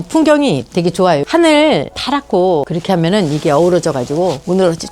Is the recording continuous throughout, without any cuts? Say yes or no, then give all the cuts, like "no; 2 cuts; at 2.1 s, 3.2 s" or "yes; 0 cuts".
no; 1 cut; at 1.2 s